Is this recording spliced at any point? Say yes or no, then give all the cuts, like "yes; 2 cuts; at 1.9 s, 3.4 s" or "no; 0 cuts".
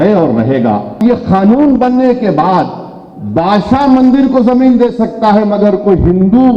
yes; 1 cut; at 1.0 s